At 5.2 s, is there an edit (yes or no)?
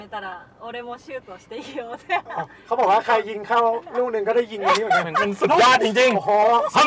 yes